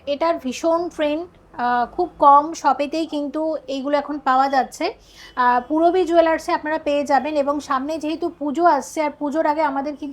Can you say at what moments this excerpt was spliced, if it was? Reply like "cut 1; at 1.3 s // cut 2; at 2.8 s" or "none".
none